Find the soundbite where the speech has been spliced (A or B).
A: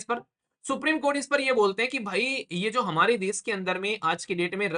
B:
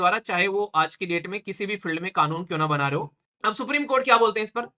B